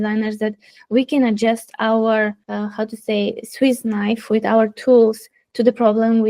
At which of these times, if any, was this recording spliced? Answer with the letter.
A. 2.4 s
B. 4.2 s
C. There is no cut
A